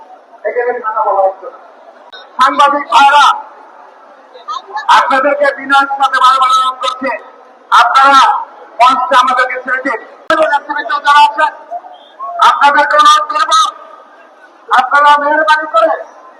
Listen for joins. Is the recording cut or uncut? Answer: cut